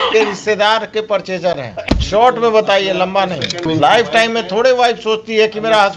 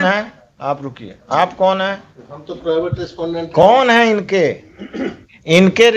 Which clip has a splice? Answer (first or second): first